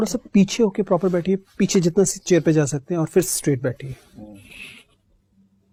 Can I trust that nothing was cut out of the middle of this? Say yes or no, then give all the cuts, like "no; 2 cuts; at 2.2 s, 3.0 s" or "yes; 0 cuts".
yes; 0 cuts